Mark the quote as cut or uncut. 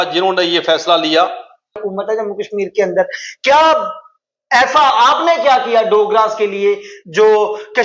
cut